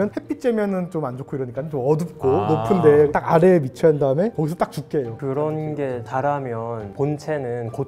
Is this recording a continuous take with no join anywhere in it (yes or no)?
no